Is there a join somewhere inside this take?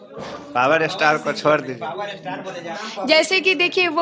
yes; 1 cut; at 2.8 s

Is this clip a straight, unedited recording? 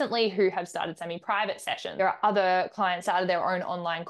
no; 2 cuts; at 1.9 s, 3.0 s

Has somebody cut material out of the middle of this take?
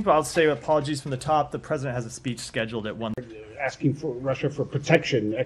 no; 0 cuts

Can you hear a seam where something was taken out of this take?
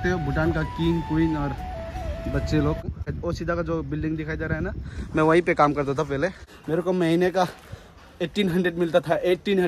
yes; 2 cuts; at 2.9 s, 6.5 s

